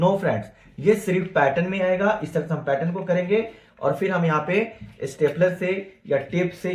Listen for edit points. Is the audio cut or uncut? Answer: uncut